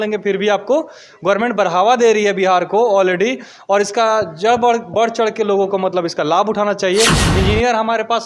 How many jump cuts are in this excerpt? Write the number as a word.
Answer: one